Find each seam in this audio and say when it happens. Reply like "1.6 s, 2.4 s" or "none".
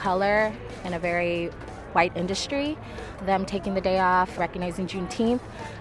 1.6 s, 3.2 s, 4.3 s